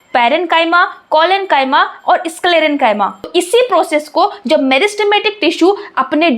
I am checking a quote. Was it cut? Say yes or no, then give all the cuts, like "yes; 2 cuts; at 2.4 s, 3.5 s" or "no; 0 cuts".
yes; 1 cut; at 3.2 s